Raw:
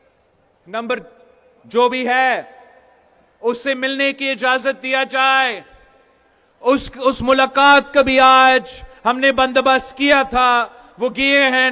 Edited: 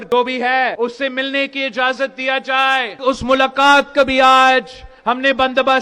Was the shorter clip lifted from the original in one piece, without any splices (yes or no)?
no